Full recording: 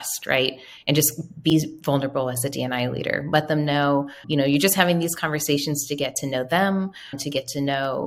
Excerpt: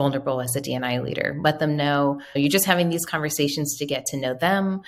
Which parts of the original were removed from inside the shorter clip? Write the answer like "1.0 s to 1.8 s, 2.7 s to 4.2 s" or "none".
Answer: 4.2 s to 4.4 s